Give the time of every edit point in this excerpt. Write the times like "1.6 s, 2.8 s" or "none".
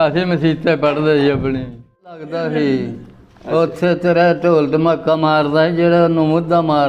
2.2 s